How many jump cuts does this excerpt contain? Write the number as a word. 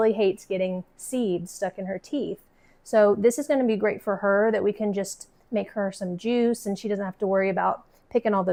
zero